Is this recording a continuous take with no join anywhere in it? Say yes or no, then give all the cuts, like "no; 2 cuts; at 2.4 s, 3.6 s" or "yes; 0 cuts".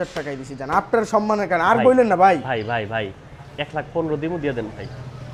yes; 0 cuts